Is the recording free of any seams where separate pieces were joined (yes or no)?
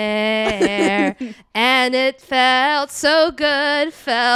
yes